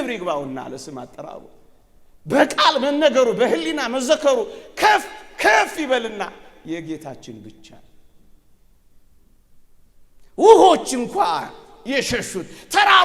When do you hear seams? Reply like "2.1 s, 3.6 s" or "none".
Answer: none